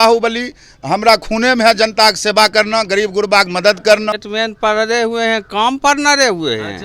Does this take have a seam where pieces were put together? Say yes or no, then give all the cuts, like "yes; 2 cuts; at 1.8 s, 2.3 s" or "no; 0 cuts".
yes; 1 cut; at 4.2 s